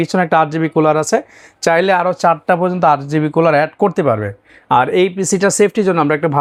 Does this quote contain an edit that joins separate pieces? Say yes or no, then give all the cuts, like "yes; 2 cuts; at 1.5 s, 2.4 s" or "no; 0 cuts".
no; 0 cuts